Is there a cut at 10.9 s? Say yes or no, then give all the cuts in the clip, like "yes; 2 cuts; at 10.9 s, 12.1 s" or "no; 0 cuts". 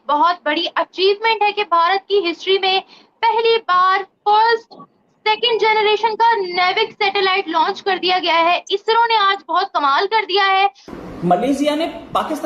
yes; 1 cut; at 10.9 s